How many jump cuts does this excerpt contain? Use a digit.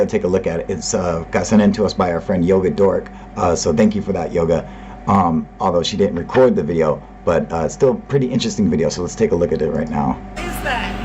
1